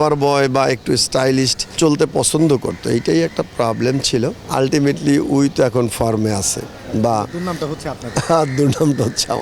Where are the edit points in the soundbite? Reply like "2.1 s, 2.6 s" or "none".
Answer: 1.6 s, 4.4 s